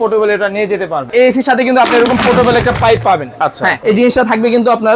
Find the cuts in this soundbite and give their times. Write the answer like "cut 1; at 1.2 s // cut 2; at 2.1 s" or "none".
cut 1; at 1.1 s // cut 2; at 3.7 s